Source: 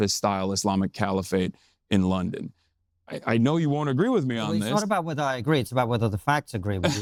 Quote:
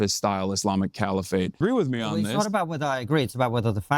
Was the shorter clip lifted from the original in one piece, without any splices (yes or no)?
no